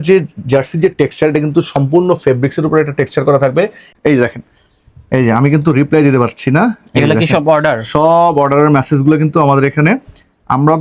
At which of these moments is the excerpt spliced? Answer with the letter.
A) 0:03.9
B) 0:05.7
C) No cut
A